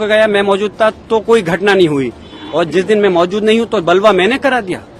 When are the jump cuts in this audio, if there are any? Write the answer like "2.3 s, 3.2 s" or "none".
none